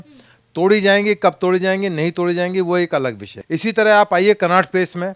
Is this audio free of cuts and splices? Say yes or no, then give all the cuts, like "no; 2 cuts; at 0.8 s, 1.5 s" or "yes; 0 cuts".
no; 1 cut; at 3.3 s